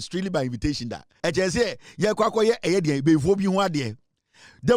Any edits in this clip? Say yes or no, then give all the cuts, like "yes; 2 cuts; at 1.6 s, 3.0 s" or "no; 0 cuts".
yes; 1 cut; at 1.0 s